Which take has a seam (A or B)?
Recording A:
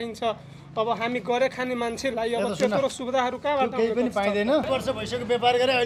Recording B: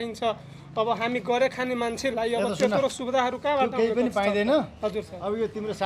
A